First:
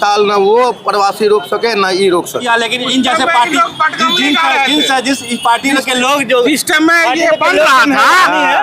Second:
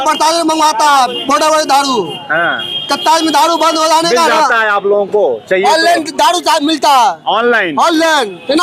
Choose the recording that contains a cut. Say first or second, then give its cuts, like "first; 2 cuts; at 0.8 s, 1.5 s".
first; 1 cut; at 2.4 s